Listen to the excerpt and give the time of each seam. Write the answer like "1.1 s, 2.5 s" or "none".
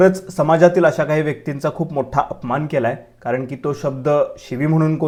none